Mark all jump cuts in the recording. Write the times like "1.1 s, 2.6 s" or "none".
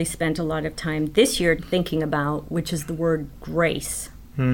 1.6 s